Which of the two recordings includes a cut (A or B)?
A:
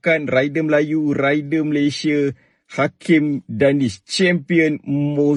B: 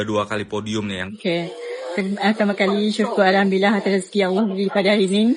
B